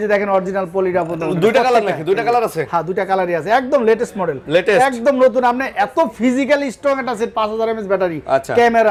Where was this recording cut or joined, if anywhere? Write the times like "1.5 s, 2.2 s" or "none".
none